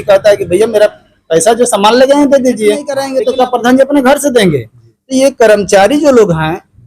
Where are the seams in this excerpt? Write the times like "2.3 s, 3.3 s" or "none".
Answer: 3.0 s